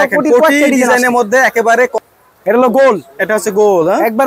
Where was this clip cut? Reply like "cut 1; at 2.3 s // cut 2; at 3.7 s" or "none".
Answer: cut 1; at 2.0 s